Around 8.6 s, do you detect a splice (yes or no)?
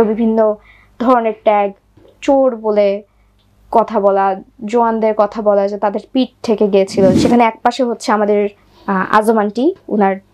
no